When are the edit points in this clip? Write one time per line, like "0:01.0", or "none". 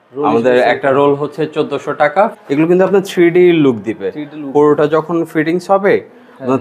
0:02.4